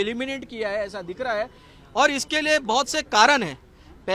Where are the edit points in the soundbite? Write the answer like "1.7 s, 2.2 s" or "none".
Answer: none